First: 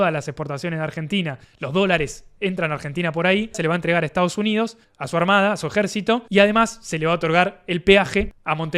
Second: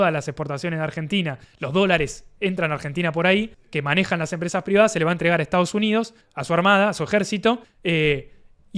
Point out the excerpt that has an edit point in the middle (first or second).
first